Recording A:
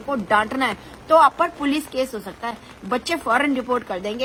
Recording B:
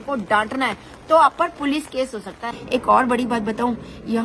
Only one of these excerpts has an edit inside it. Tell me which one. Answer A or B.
B